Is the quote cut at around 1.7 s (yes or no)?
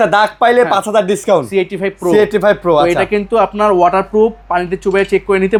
no